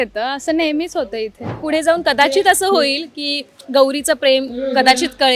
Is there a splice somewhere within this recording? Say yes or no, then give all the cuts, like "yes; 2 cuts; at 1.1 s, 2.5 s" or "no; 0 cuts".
yes; 1 cut; at 1.5 s